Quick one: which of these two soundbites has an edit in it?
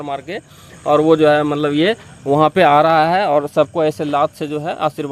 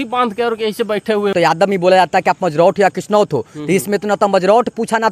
second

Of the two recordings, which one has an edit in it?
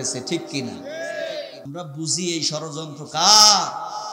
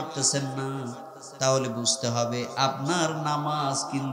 first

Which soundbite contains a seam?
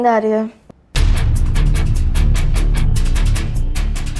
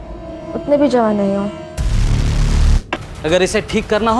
second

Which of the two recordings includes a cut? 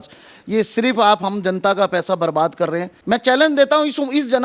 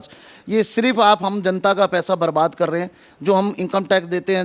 first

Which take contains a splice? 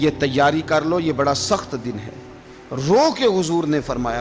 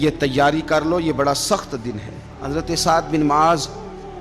second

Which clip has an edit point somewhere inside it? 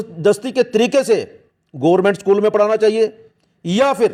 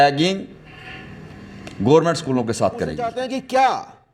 second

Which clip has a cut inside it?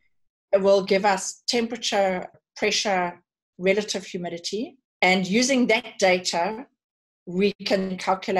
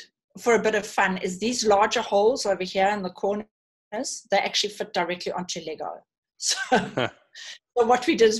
first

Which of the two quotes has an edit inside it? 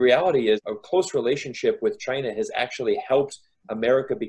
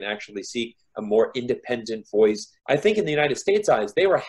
second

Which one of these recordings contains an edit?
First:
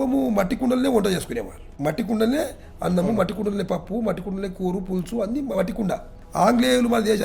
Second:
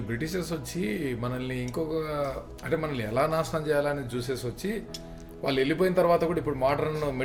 first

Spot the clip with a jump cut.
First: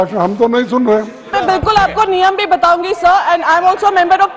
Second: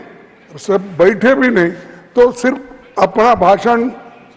first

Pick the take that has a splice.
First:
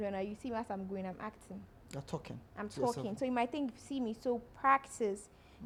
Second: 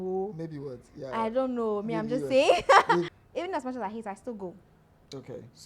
second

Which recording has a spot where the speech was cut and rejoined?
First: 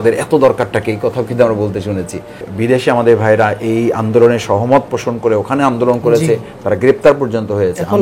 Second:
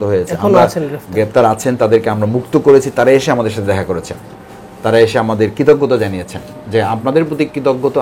first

